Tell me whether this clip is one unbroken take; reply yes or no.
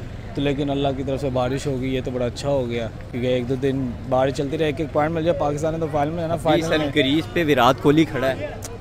yes